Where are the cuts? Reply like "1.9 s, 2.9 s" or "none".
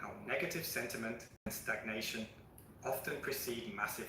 1.3 s

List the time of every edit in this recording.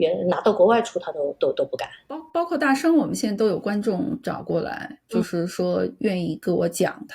2.2 s

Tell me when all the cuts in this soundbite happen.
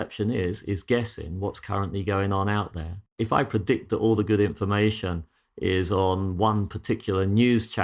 3.2 s

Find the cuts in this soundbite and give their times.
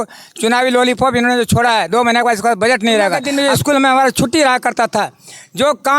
3.2 s

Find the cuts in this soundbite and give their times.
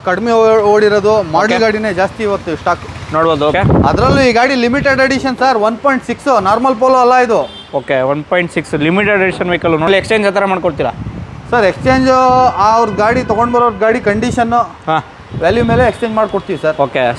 3.5 s, 9.9 s

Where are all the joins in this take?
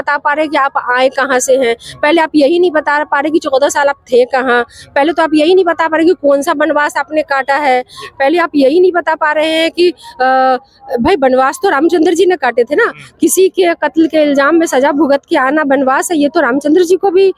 none

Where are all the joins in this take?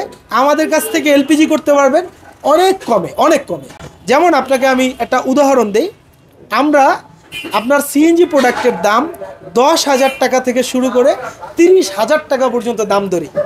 none

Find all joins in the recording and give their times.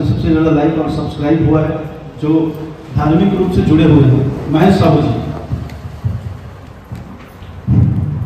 none

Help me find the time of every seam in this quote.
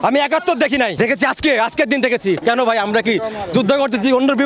0.9 s, 2.4 s

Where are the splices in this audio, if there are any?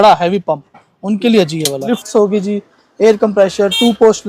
1.9 s

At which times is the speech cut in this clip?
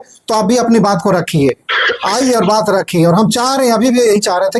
none

